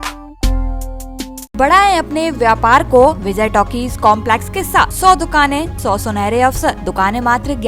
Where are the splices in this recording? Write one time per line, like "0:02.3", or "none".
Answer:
0:01.6
0:03.2
0:04.9
0:05.7
0:06.8